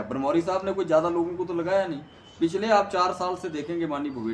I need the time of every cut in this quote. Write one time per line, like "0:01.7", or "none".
none